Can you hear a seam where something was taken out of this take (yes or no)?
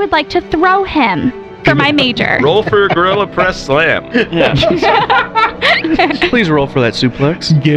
yes